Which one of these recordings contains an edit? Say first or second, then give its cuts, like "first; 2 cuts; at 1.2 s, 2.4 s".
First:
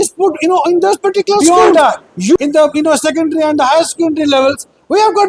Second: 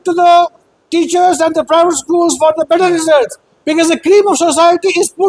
first; 1 cut; at 1.4 s